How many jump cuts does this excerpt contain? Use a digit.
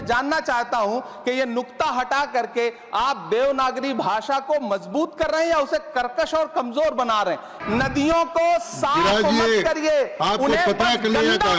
1